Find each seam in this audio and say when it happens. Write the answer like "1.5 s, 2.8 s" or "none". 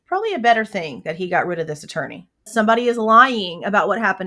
2.5 s

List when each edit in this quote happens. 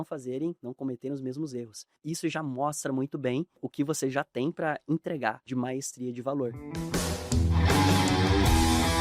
2.0 s, 3.7 s, 5.4 s, 6.7 s

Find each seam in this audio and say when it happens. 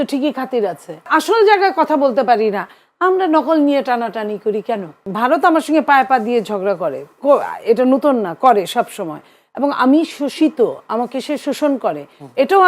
1.1 s, 5.0 s

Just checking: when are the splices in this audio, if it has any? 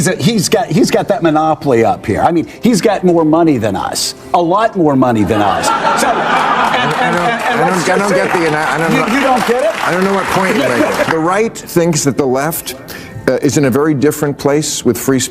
11.1 s

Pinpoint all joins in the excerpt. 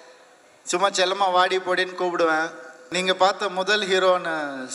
2.9 s

